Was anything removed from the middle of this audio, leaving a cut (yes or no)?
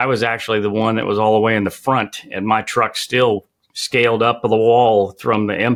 no